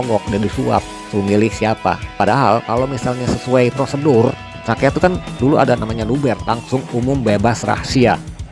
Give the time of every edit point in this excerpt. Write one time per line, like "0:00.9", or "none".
none